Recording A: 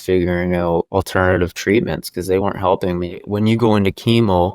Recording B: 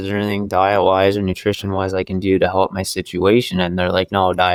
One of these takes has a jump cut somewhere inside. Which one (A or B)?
A